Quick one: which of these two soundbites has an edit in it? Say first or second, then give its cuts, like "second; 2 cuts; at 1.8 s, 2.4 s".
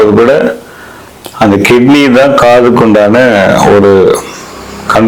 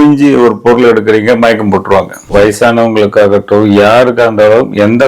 second; 1 cut; at 2.2 s